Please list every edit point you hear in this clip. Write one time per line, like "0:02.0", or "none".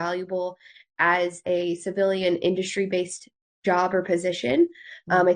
0:01.4